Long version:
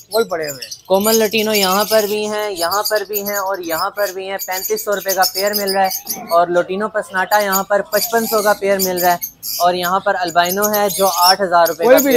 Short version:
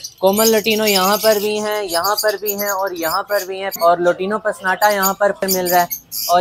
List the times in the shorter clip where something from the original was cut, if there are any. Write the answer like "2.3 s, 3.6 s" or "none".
3.7 s, 5.4 s